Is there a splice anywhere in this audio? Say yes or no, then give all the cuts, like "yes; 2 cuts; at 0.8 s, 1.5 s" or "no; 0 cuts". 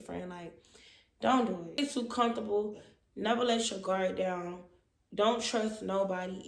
yes; 1 cut; at 1.8 s